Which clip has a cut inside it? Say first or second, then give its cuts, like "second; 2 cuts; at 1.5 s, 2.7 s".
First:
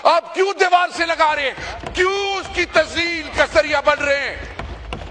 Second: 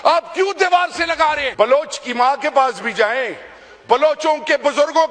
second; 1 cut; at 1.5 s